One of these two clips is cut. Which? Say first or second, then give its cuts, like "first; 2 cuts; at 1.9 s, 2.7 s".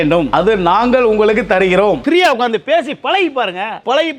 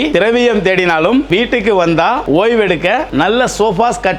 first; 1 cut; at 2.0 s